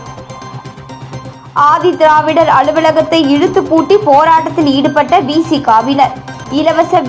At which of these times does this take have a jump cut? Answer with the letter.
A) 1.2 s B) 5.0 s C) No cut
A